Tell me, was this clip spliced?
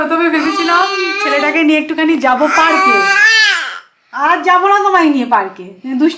no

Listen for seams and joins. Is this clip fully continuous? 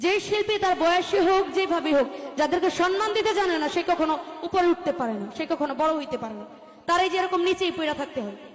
yes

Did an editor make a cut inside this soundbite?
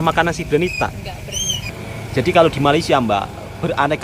yes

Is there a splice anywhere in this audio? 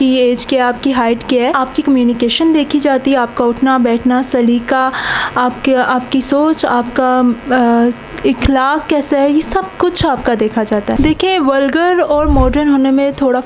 yes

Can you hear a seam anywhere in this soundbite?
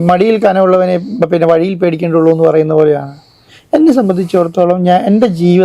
no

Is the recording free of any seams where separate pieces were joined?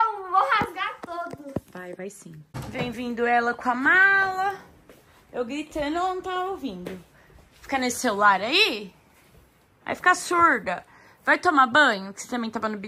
no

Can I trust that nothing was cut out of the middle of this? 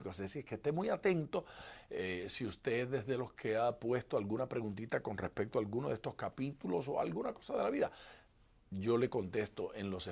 yes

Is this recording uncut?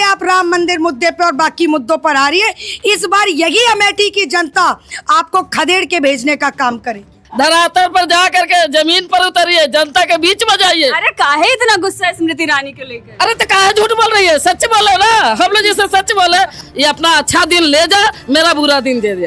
no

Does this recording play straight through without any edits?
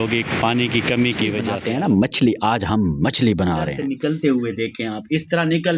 no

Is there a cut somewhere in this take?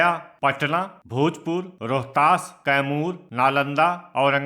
yes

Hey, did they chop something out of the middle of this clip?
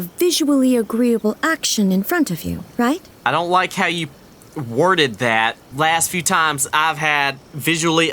yes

